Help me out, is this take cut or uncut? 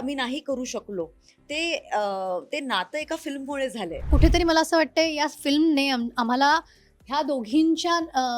cut